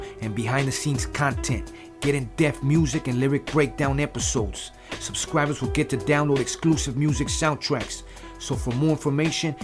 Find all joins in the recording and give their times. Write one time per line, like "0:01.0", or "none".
none